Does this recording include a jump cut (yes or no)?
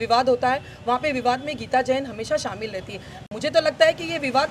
no